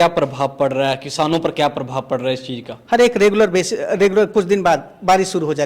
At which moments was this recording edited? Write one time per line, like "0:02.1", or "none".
0:02.7